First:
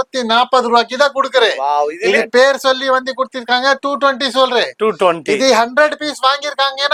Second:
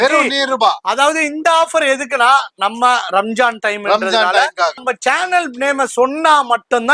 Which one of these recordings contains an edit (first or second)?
second